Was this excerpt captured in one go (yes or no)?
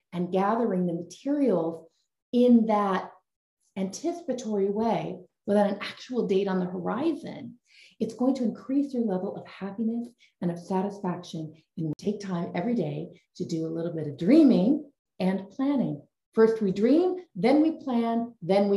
no